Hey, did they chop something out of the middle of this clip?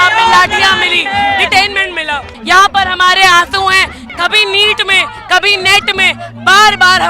yes; 2 cuts; at 2.3 s, 4.0 s

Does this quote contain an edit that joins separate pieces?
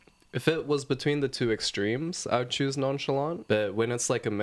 yes; 1 cut; at 3.4 s

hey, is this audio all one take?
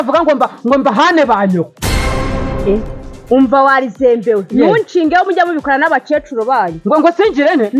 yes; 0 cuts

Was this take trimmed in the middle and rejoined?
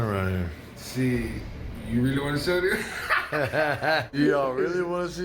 yes; 1 cut; at 4.1 s

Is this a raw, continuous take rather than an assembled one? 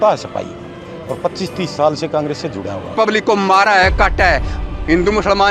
no; 1 cut; at 2.9 s

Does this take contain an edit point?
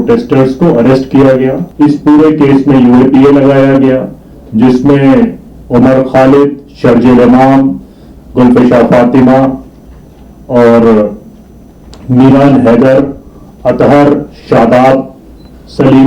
yes; 1 cut; at 1.6 s

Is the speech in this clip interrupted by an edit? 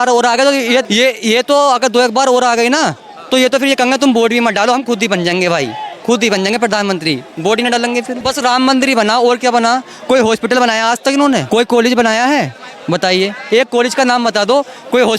yes; 3 cuts; at 0.9 s, 8.2 s, 11.5 s

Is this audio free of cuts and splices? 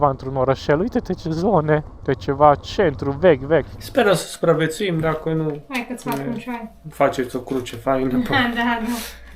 no; 2 cuts; at 1.9 s, 3.8 s

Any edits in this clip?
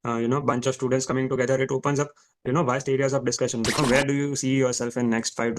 yes; 1 cut; at 3.8 s

